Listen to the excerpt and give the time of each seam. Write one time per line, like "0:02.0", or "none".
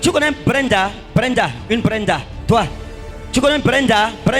none